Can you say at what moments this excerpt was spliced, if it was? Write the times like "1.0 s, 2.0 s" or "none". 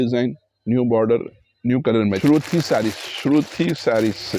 2.1 s